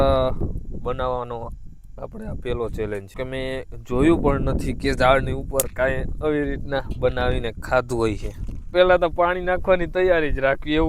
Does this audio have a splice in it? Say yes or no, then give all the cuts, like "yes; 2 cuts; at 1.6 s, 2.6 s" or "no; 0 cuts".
yes; 2 cuts; at 3.2 s, 8.7 s